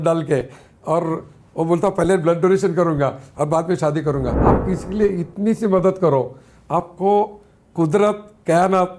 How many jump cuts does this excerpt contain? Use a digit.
1